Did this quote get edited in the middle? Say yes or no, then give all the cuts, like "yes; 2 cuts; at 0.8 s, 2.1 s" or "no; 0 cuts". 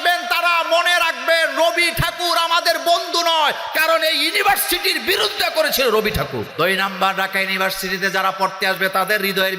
yes; 1 cut; at 6.5 s